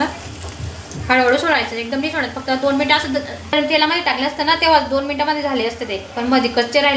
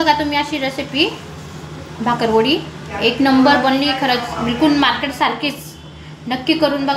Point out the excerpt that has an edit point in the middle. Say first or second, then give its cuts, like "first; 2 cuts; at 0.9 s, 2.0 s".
first; 1 cut; at 3.5 s